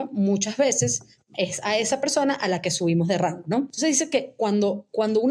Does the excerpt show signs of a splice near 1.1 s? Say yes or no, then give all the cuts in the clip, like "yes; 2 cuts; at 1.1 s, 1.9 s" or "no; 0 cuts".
no; 1 cut; at 3.7 s